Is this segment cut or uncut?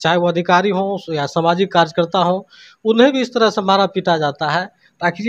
uncut